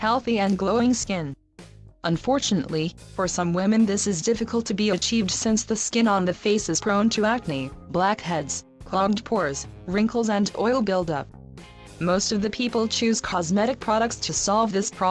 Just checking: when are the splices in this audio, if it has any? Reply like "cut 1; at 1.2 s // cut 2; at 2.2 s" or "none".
cut 1; at 6.8 s